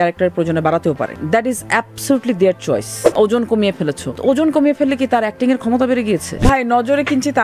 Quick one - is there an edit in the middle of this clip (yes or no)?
yes